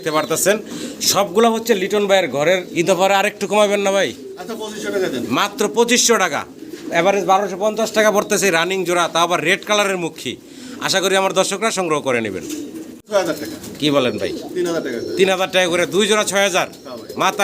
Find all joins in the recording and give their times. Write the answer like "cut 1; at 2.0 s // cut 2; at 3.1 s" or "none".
cut 1; at 2.7 s // cut 2; at 13.1 s